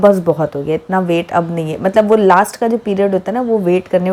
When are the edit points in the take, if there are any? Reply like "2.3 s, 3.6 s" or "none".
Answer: none